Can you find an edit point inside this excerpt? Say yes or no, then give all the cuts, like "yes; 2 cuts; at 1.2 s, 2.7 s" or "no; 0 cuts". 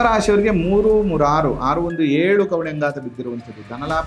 no; 0 cuts